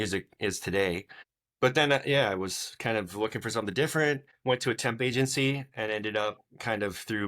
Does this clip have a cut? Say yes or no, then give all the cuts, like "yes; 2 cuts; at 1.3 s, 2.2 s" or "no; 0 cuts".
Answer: yes; 2 cuts; at 1.1 s, 4.3 s